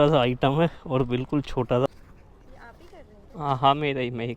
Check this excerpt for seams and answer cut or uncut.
cut